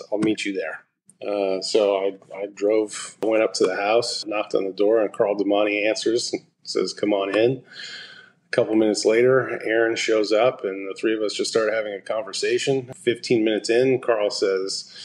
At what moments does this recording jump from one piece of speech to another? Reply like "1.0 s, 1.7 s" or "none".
3.2 s, 4.3 s, 12.9 s